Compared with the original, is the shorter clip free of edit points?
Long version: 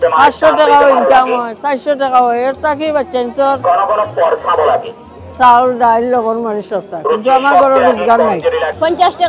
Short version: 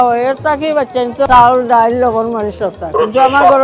no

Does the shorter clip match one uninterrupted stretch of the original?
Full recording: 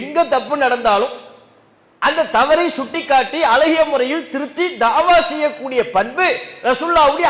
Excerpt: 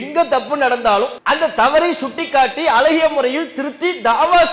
no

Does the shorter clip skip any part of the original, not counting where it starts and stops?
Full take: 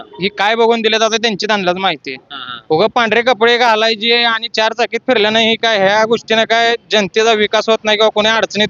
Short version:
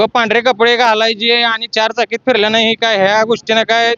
no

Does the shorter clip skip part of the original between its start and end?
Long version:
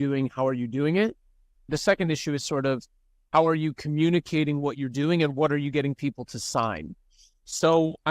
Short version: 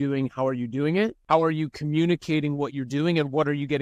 yes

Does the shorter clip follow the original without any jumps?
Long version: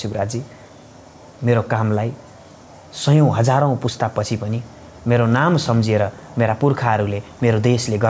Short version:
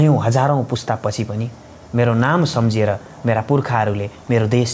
yes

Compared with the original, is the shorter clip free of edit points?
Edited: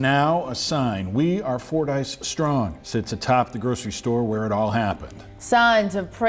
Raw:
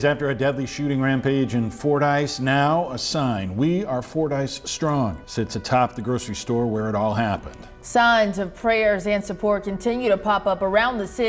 yes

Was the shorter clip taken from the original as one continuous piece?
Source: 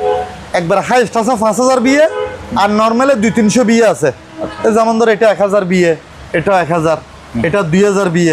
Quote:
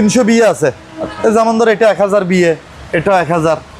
yes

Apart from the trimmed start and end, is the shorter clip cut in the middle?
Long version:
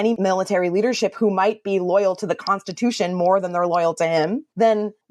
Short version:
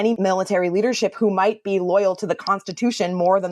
no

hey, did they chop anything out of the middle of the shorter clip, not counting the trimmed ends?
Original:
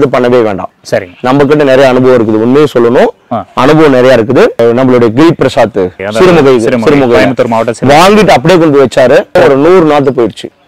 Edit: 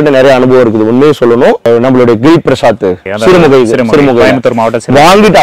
yes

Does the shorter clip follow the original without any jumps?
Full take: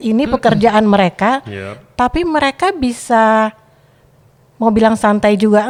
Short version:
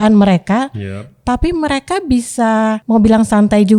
no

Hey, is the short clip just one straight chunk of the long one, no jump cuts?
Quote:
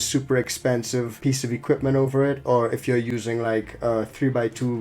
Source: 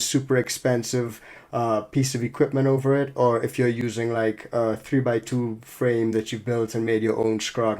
no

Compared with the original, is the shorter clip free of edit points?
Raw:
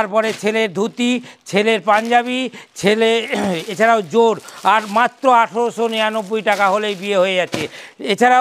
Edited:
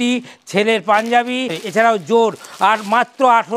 no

